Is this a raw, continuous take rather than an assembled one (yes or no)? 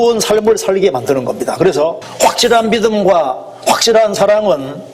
no